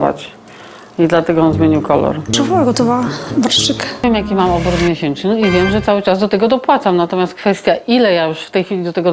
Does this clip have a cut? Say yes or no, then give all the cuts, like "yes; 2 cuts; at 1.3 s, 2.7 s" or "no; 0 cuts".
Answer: yes; 2 cuts; at 2.2 s, 4.0 s